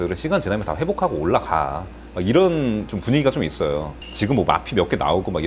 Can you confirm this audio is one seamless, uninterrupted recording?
yes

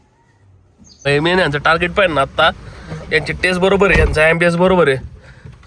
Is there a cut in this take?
yes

